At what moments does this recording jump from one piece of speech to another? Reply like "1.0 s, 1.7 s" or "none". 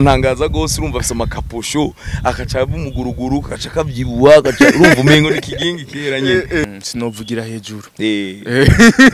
6.6 s